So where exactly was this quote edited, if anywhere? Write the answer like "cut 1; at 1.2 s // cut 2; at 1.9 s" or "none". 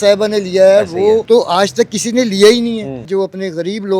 cut 1; at 1.2 s // cut 2; at 3.1 s